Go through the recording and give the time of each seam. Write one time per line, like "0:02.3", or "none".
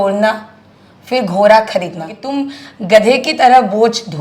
0:02.2

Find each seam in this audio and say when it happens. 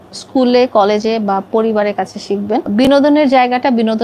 0:02.7

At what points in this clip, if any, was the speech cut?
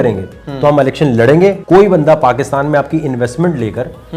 0:01.6

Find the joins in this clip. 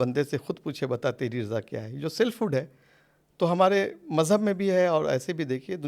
none

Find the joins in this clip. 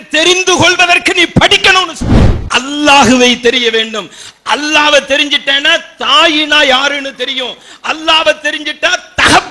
0:02.3

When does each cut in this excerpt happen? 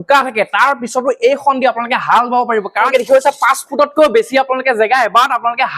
0:02.9

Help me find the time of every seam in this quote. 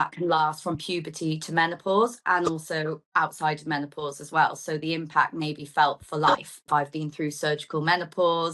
0:06.7

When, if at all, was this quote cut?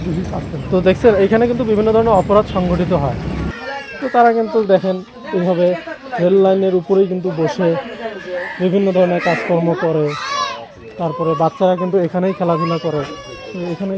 0:03.4

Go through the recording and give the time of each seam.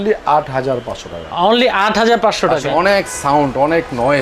0:02.6

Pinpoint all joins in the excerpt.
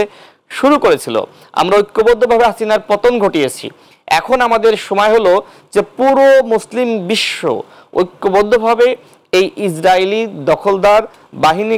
none

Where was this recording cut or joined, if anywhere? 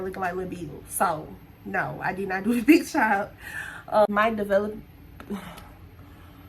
0:04.1

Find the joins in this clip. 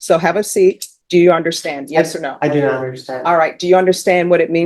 0:00.9

